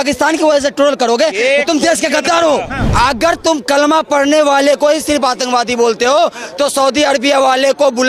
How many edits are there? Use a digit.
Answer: 1